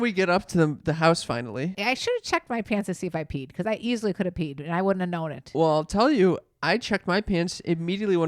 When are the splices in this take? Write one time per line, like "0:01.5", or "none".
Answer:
0:01.7